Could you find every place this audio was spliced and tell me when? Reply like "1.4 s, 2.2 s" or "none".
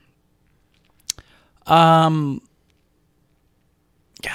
none